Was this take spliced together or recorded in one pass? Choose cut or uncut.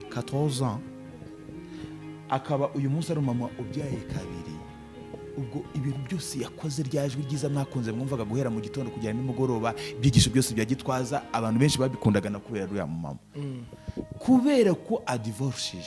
uncut